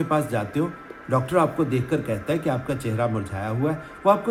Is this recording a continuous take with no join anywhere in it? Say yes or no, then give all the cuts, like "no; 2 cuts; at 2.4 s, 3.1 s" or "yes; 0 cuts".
yes; 0 cuts